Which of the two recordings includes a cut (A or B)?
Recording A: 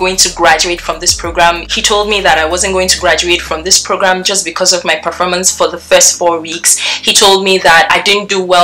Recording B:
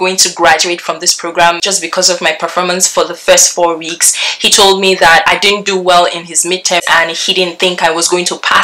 B